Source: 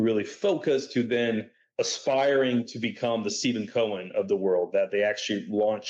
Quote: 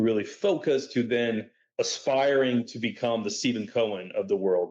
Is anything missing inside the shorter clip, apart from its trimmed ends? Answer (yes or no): no